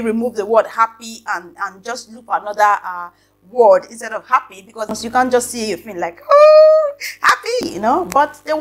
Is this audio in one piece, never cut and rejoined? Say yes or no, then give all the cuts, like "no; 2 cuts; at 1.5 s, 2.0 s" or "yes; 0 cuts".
no; 2 cuts; at 4.8 s, 7.6 s